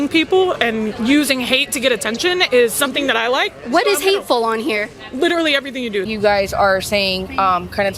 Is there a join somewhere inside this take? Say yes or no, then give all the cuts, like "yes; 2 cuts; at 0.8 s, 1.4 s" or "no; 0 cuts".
yes; 1 cut; at 6.1 s